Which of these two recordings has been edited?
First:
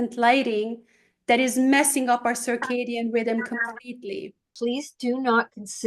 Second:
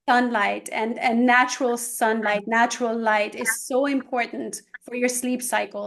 first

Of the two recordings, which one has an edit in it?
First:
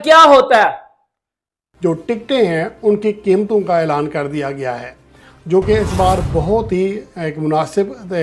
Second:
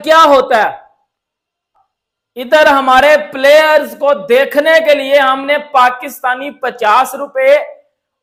first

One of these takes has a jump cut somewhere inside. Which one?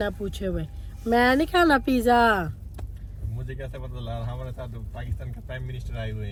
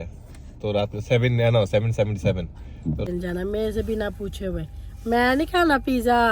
second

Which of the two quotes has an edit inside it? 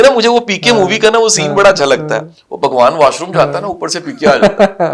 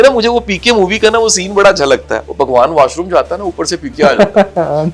second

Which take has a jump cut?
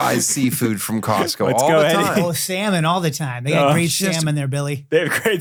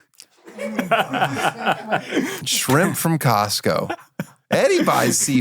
second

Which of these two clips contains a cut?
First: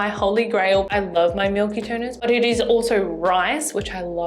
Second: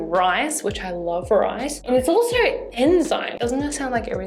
first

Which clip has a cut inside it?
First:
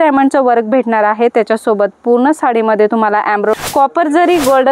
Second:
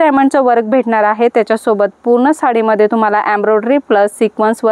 first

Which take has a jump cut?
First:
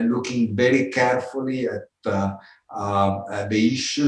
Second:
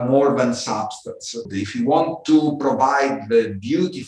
second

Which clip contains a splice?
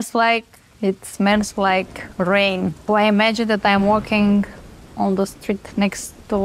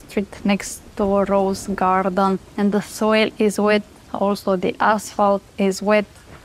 second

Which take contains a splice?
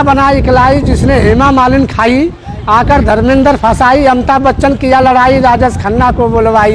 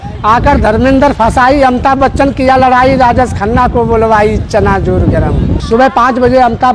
second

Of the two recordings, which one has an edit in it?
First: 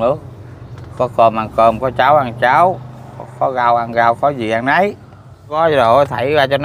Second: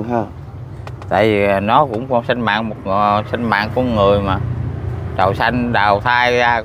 first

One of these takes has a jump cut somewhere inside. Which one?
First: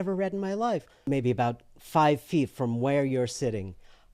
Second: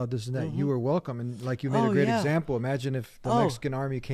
first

